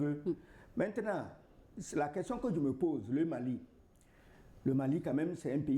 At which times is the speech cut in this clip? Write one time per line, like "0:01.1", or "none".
none

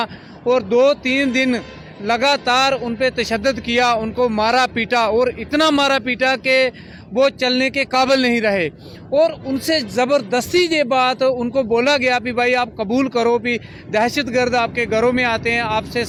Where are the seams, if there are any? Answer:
none

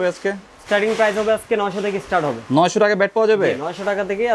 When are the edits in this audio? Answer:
none

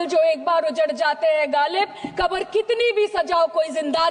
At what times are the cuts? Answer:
none

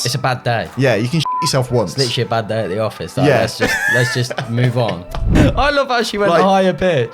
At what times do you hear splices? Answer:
0:05.4

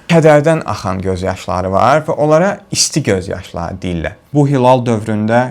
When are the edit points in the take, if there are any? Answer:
0:04.2

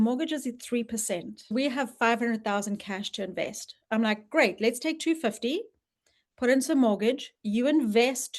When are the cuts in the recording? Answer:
0:01.5

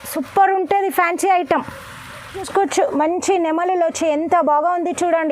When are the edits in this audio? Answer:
0:02.4

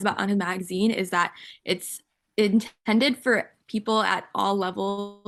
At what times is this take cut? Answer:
none

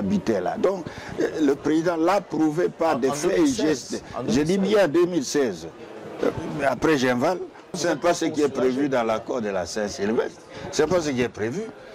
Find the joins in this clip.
0:07.8

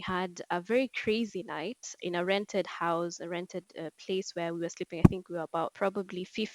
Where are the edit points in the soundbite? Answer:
none

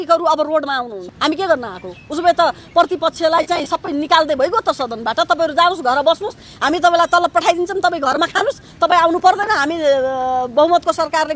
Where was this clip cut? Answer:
0:01.0

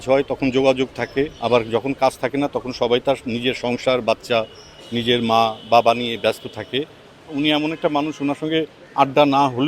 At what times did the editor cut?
0:01.3
0:07.3

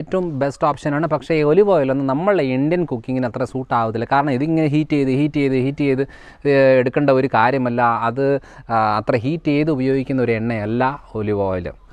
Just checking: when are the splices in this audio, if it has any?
none

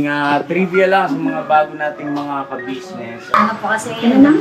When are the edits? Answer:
0:03.3

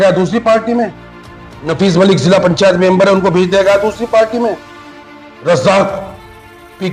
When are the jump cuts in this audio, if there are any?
none

